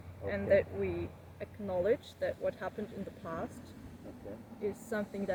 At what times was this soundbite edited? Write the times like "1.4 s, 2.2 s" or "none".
none